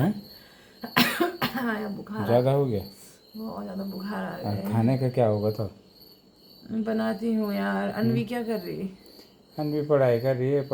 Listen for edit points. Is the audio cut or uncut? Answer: uncut